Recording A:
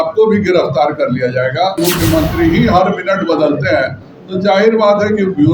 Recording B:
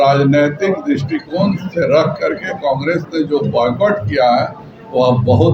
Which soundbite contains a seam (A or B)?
A